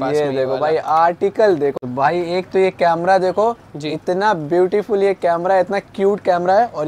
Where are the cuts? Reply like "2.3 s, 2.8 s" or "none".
1.7 s